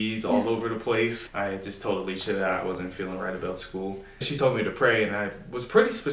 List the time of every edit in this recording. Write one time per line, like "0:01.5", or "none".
0:01.2
0:04.3